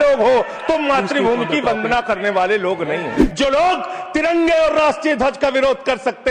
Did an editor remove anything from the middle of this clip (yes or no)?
yes